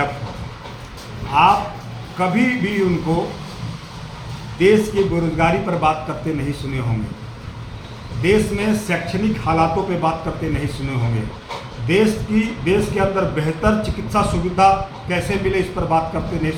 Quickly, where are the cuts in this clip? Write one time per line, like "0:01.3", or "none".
none

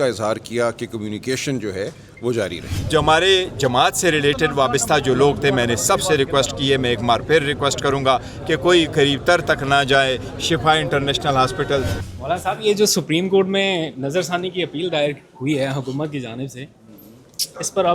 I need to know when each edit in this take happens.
0:02.8
0:12.0

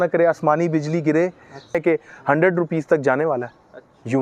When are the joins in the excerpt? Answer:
0:01.8

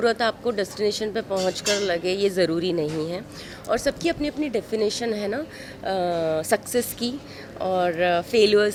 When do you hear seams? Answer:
none

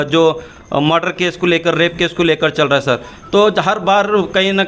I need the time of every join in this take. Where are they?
none

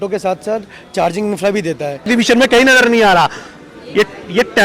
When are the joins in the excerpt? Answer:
0:02.1

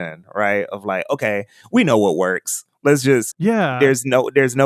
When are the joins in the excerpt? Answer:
0:03.4

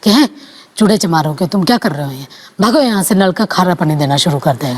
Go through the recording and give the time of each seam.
none

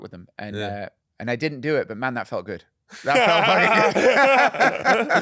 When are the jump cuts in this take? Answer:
0:01.0

